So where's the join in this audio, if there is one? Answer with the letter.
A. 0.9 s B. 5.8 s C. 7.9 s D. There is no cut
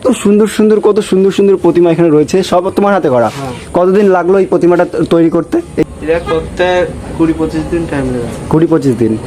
B